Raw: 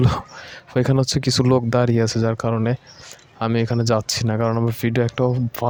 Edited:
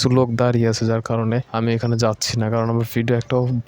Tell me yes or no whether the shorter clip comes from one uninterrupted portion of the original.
no